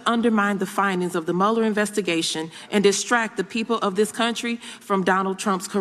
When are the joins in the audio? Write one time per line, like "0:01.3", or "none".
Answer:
none